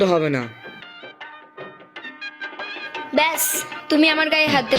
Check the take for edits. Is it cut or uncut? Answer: cut